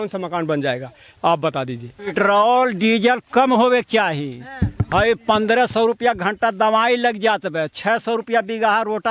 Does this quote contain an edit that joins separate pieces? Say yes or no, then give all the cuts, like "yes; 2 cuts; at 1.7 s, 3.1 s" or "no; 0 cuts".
yes; 1 cut; at 2.1 s